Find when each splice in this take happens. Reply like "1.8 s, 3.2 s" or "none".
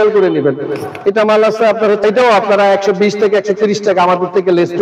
2.0 s

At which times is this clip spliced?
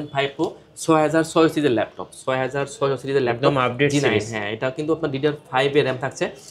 none

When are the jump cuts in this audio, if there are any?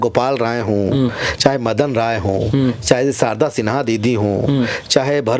none

